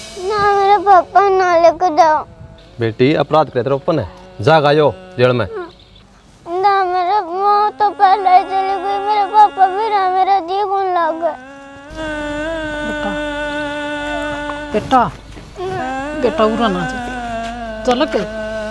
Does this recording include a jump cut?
no; 0 cuts

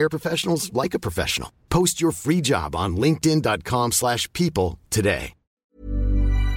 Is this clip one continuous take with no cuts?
no; 1 cut; at 5.6 s

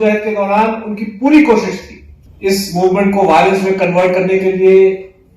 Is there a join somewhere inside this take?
no; 0 cuts

